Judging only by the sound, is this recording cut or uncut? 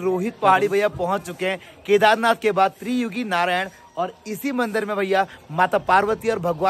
uncut